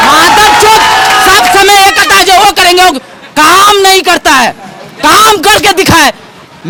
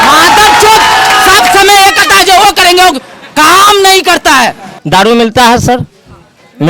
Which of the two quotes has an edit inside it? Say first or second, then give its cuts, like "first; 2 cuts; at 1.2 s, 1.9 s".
second; 1 cut; at 5.0 s